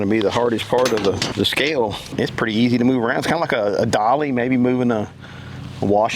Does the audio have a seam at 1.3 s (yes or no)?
yes